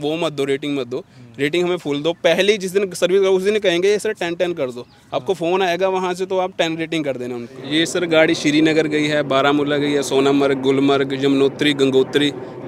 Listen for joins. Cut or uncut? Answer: cut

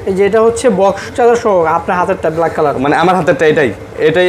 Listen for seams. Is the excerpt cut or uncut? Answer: uncut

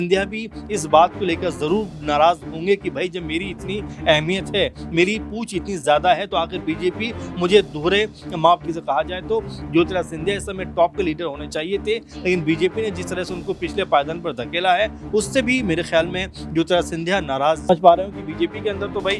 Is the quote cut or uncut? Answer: cut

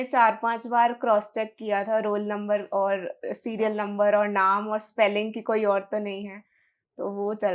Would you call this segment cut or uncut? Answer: uncut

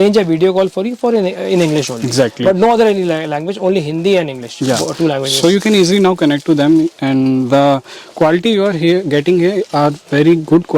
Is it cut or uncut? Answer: uncut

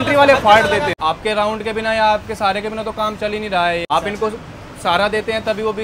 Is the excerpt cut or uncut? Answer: cut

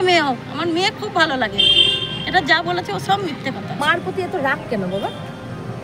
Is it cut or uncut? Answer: cut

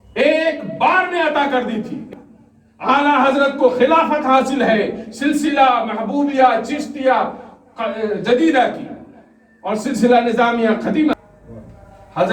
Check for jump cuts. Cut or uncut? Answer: cut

